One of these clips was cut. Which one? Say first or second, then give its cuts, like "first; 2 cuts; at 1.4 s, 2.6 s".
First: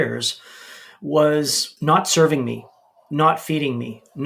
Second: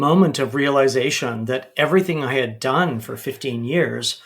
first; 1 cut; at 1.6 s